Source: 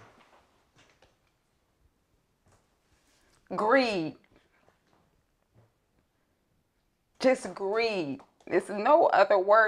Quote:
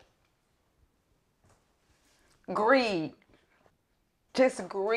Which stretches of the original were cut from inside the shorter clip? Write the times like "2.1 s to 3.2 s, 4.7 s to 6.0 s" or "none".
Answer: 4.7 s to 6.6 s